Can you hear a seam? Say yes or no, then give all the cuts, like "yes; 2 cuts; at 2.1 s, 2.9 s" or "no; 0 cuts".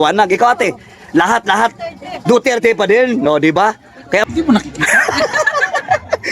yes; 1 cut; at 4.2 s